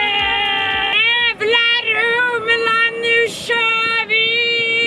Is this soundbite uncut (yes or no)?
no